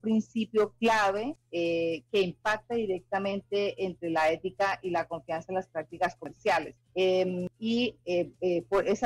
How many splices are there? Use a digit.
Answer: 3